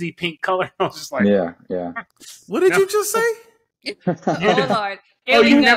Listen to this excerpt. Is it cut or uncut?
uncut